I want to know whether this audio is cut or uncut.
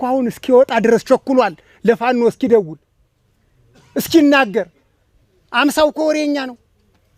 uncut